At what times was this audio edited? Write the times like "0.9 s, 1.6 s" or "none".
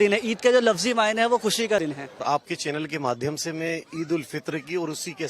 2.1 s